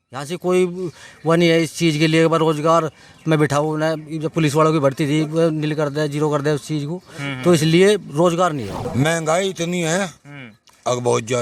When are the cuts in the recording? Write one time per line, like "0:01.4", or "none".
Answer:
0:08.8